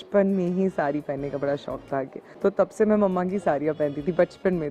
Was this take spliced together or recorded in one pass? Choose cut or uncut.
cut